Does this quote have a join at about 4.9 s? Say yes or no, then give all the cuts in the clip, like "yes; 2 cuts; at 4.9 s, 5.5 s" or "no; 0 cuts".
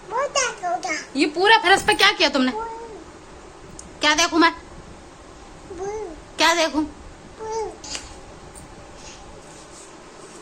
no; 1 cut; at 7.8 s